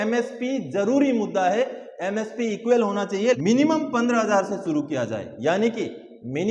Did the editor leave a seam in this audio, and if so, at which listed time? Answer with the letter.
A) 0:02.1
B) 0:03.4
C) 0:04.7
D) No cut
B